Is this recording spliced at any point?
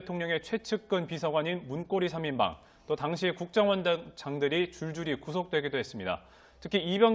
no; 0 cuts

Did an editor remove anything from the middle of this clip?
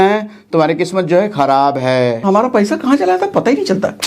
yes; 1 cut; at 2.2 s

